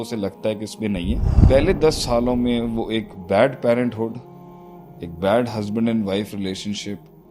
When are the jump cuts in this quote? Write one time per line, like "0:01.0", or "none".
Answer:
0:01.3

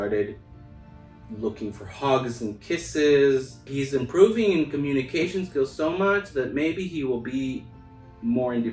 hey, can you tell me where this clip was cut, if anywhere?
0:03.7

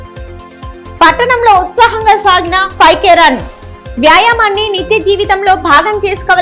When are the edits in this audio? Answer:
0:00.9

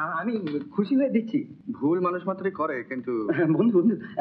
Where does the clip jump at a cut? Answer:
0:01.6

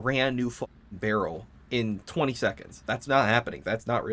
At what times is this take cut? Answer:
0:02.1

